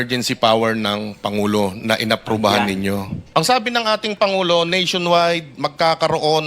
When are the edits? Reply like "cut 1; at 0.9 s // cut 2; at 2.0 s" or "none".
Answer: cut 1; at 3.2 s